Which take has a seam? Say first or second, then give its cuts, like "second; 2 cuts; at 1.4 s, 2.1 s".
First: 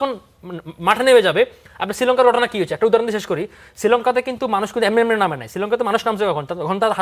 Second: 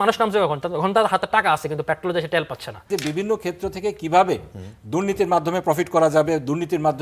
second; 1 cut; at 2.7 s